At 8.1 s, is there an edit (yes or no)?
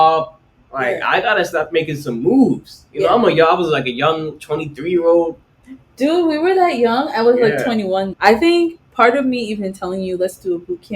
yes